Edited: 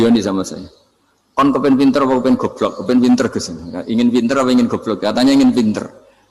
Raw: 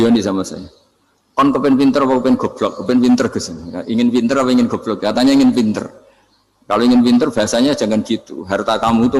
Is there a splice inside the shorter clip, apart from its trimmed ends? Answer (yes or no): no